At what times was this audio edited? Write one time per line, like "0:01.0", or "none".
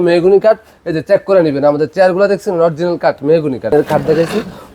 0:03.7